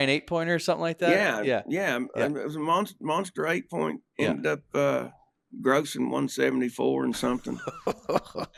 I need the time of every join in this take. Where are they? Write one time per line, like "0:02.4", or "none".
none